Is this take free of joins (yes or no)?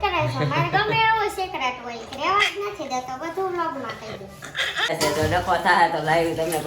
no